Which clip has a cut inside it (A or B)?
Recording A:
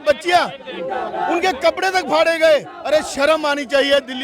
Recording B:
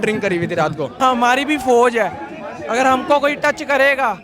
B